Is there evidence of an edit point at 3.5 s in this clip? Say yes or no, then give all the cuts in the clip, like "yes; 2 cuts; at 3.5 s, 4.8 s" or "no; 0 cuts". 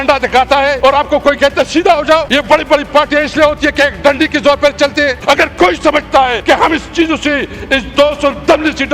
no; 4 cuts; at 0.8 s, 2.3 s, 5.2 s, 6.4 s